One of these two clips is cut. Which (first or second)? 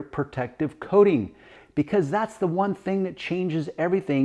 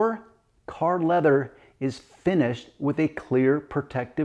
first